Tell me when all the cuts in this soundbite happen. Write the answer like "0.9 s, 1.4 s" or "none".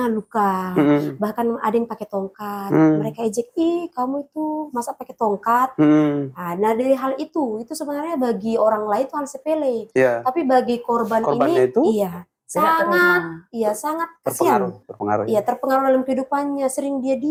none